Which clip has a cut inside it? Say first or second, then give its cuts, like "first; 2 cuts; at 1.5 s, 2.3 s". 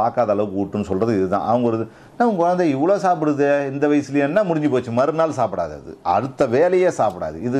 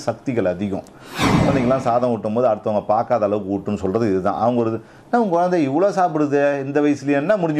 second; 1 cut; at 1.5 s